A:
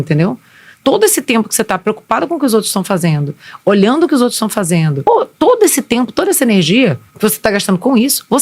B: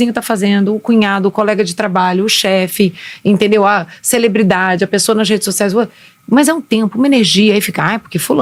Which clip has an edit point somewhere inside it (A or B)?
A